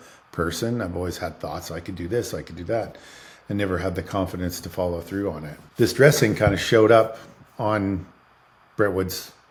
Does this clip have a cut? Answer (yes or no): no